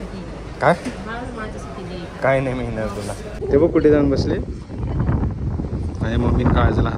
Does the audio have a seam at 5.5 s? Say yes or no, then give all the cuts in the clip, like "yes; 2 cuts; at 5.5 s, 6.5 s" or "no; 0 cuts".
no; 1 cut; at 3.3 s